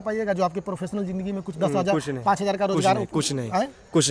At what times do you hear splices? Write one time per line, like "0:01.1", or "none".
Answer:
none